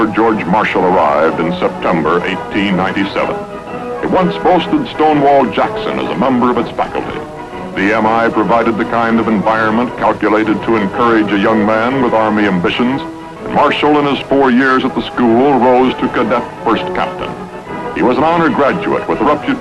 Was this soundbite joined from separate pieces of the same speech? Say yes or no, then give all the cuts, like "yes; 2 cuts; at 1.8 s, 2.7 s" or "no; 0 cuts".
yes; 1 cut; at 12.8 s